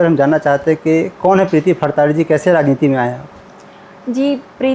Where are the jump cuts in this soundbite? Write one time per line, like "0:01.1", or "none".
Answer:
none